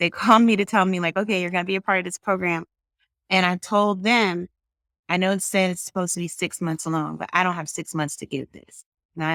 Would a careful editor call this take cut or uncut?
uncut